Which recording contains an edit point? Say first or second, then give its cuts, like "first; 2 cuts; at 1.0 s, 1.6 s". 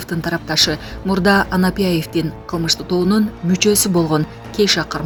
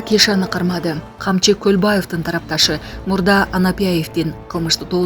second; 1 cut; at 1.1 s